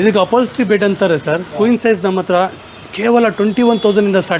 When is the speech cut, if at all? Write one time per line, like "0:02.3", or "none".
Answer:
0:01.4